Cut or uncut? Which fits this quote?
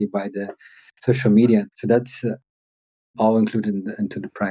cut